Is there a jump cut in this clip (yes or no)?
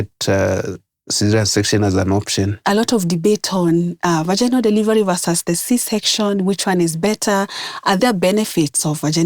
yes